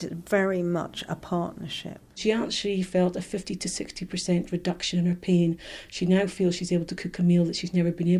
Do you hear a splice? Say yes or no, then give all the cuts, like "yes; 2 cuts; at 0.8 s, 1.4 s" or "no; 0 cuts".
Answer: yes; 1 cut; at 2.2 s